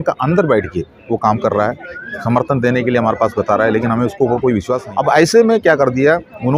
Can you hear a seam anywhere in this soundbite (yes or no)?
yes